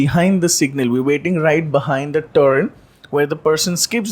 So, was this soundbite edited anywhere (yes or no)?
no